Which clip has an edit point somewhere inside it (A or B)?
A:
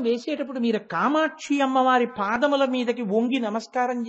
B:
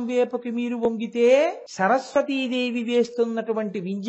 B